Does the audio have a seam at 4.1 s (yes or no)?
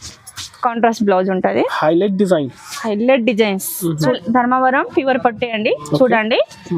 yes